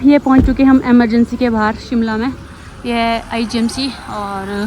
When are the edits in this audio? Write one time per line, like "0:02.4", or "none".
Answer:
none